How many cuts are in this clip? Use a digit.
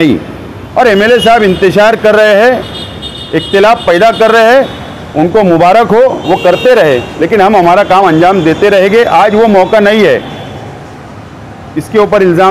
0